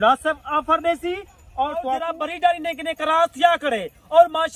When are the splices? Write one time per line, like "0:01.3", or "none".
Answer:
0:02.1